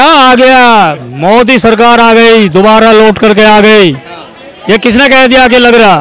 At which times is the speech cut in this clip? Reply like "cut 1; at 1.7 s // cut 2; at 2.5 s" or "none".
none

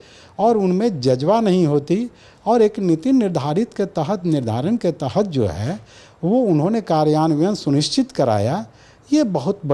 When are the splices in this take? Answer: none

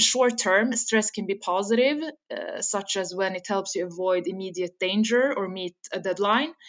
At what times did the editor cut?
none

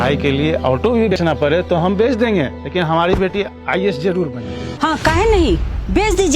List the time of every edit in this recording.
cut 1; at 1.1 s // cut 2; at 4.6 s

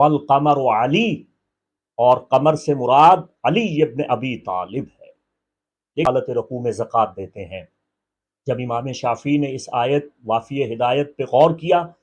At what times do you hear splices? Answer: cut 1; at 6.1 s

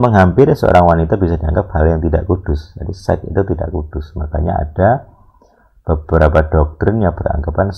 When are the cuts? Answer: none

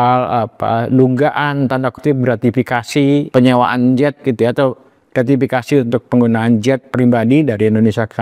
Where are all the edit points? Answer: cut 1; at 3.3 s

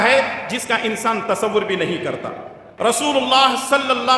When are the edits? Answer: cut 1; at 2.7 s

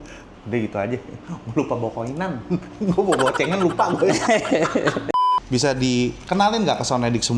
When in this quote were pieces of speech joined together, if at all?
cut 1; at 5.2 s

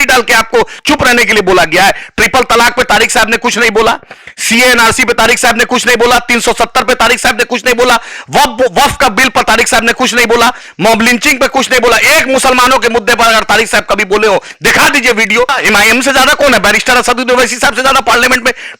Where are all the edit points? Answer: cut 1; at 15.5 s

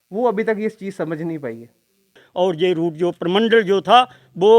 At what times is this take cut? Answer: cut 1; at 2.2 s

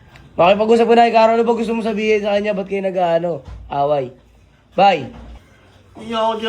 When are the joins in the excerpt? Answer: cut 1; at 5.4 s

